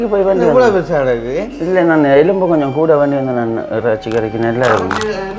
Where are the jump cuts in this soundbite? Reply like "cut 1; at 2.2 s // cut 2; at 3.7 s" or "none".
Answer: none